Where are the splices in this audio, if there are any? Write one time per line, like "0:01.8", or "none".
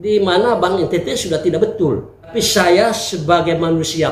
0:02.3